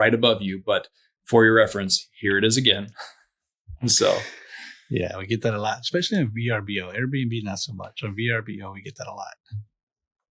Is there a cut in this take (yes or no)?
no